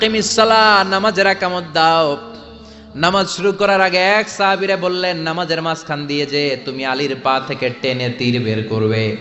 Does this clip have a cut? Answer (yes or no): no